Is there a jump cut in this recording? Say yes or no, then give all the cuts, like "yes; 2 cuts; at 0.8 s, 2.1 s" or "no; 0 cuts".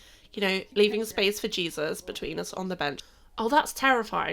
yes; 1 cut; at 3.0 s